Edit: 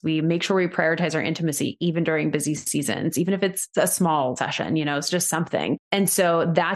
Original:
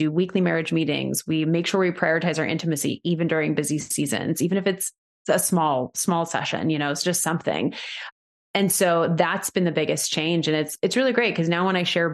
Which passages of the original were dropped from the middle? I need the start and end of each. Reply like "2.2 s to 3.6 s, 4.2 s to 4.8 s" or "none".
4.9 s to 5.1 s, 5.9 s to 6.3 s, 7.8 s to 8.5 s